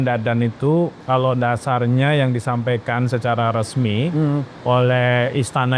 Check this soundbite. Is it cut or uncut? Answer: cut